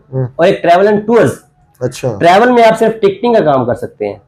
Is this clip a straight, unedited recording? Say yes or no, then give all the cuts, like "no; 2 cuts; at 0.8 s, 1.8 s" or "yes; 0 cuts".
yes; 0 cuts